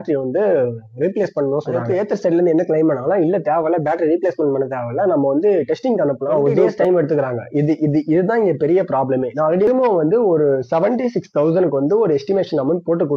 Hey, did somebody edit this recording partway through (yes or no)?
yes